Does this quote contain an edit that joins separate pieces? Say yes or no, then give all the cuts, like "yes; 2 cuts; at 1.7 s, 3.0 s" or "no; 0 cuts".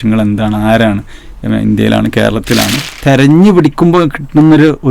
yes; 1 cut; at 2.8 s